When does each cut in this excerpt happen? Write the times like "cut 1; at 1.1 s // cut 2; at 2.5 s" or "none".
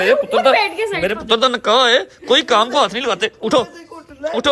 none